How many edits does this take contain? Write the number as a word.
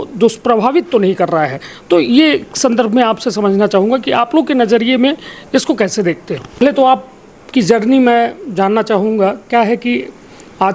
one